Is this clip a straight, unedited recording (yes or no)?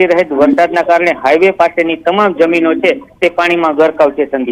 yes